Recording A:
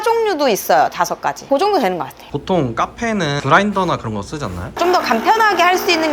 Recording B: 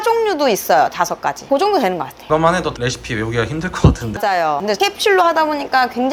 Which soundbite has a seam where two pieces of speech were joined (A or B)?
A